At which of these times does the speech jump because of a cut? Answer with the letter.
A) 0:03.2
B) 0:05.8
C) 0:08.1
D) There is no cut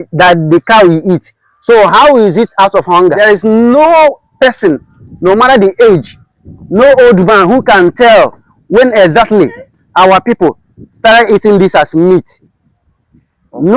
A